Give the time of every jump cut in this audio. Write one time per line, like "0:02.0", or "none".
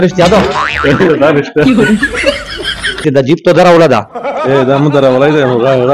0:03.0